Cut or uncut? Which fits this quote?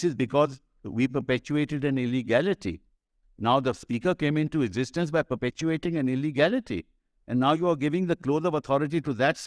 uncut